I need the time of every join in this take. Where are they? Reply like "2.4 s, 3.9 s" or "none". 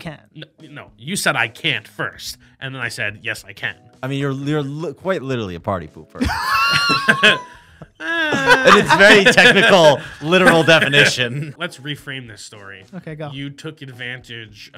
3.8 s, 11.5 s